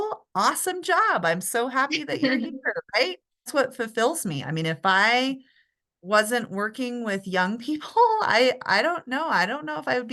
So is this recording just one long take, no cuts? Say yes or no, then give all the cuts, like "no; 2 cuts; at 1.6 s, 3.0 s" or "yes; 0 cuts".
no; 1 cut; at 3.5 s